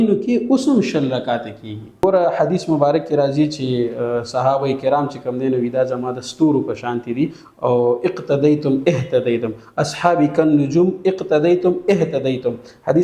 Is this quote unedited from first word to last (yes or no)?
no